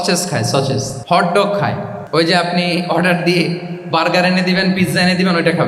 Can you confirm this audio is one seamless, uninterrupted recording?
no; 2 cuts; at 0.9 s, 2.0 s

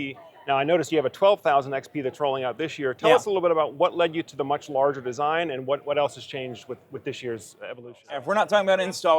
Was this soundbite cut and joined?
yes; 1 cut; at 8.0 s

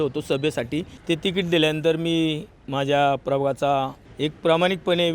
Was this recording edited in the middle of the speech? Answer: yes; 2 cuts; at 0.9 s, 4.0 s

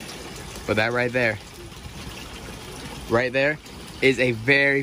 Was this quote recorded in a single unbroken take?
yes; 0 cuts

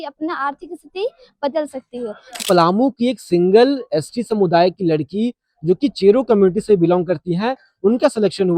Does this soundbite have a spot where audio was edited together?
yes; 1 cut; at 2.4 s

